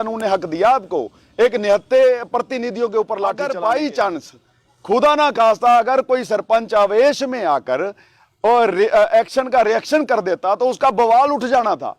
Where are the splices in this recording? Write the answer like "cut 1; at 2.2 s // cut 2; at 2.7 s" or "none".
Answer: cut 1; at 3.4 s